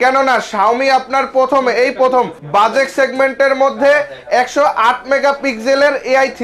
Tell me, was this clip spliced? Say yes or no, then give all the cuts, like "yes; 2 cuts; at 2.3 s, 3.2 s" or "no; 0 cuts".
yes; 1 cut; at 2.4 s